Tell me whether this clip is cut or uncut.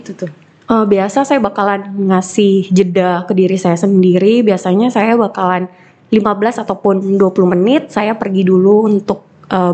uncut